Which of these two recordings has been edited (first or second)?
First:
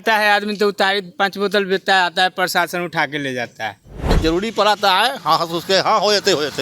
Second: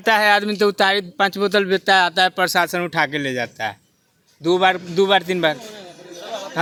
first